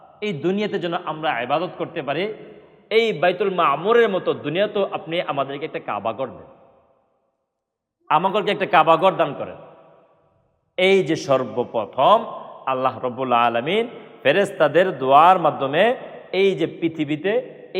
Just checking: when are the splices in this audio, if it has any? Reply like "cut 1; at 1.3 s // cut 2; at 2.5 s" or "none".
none